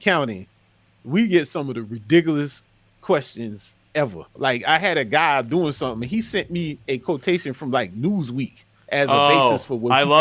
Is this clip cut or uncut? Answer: cut